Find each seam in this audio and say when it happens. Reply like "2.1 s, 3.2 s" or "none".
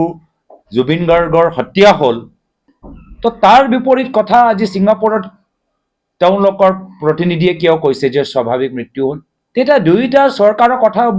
9.3 s